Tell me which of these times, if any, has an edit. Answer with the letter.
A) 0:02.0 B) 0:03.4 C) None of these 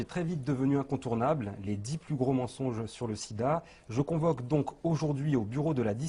C